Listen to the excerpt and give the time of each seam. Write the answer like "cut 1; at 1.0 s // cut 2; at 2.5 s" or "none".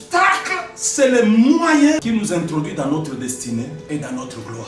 cut 1; at 2.0 s // cut 2; at 3.8 s